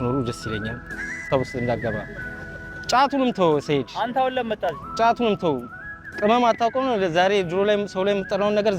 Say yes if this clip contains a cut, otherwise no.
yes